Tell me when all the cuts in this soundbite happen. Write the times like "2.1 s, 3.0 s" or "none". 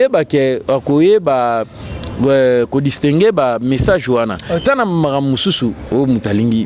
4.6 s